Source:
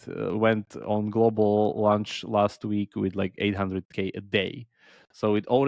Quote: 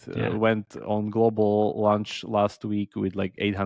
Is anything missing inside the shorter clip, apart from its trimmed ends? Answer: no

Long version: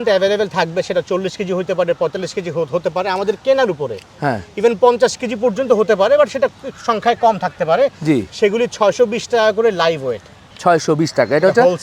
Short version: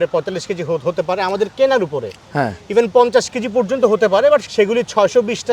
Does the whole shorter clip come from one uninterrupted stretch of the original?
no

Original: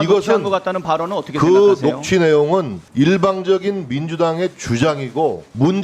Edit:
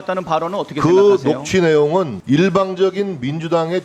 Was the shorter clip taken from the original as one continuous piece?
no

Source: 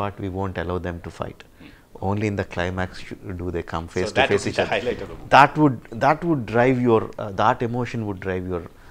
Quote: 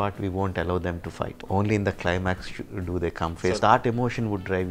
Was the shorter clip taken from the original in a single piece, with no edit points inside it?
no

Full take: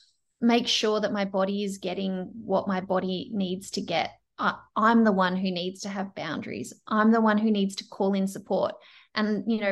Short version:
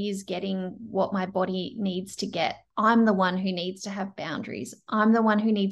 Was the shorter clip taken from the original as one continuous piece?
no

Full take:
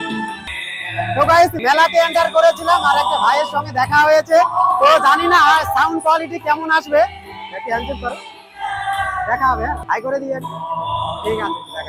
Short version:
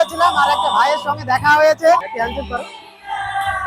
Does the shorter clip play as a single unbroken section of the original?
no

